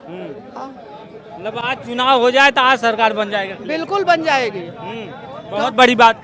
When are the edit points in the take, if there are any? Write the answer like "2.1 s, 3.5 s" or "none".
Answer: none

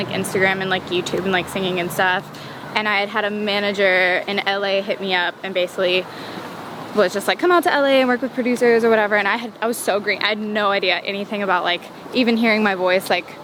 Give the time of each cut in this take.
none

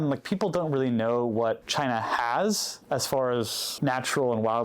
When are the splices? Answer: 1.6 s, 2.7 s, 3.6 s

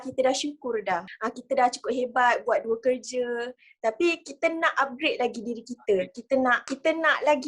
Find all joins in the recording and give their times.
1.1 s

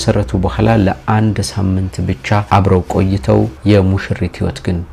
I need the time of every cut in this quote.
none

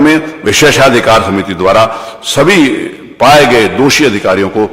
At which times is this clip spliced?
none

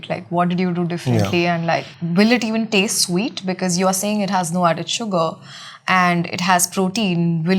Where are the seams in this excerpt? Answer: 2.0 s

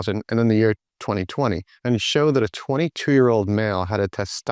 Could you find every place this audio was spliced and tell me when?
1.7 s

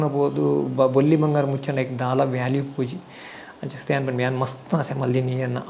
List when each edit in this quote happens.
none

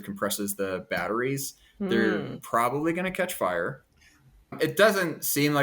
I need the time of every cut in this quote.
4.5 s

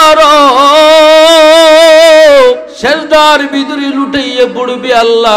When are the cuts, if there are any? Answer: 2.7 s

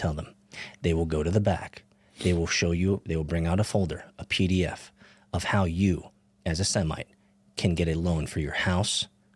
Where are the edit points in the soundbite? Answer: none

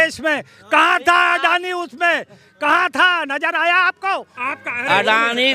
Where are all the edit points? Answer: 4.3 s

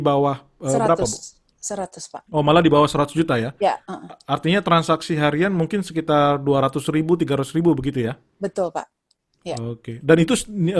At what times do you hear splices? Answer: none

